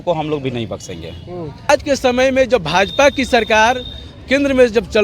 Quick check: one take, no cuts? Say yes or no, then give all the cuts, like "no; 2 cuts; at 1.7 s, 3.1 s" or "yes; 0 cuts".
no; 1 cut; at 1.7 s